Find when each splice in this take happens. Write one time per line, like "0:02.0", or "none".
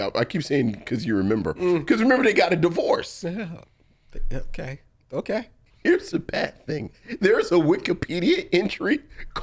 0:05.6